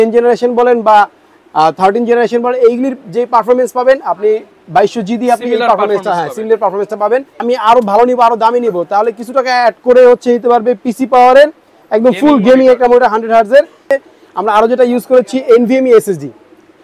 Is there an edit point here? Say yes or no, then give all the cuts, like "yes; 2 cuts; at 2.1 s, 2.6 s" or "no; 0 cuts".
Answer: yes; 2 cuts; at 7.4 s, 13.8 s